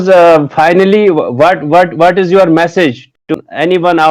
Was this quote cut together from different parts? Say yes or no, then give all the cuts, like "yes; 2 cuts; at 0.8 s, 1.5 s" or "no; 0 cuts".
yes; 1 cut; at 3.2 s